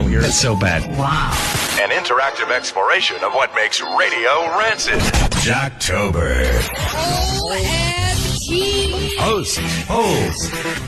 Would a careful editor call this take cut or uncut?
uncut